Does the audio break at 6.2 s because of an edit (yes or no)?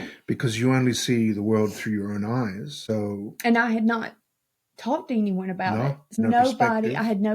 yes